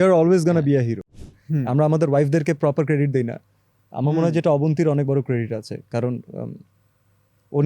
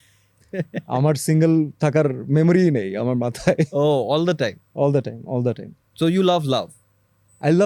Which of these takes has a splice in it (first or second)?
first